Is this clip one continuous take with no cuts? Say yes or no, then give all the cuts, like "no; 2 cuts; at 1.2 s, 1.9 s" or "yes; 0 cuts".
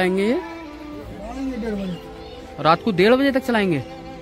yes; 0 cuts